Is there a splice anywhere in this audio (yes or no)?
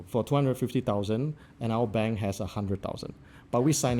no